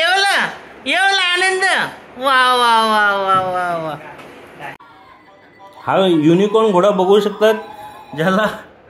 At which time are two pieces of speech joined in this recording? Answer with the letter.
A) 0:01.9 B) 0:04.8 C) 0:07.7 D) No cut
B